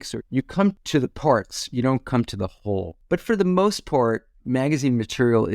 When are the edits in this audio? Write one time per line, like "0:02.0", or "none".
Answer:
0:00.8
0:02.9